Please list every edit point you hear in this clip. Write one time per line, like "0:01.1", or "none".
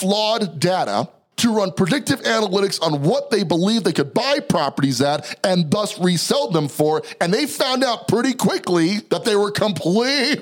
0:01.2
0:09.0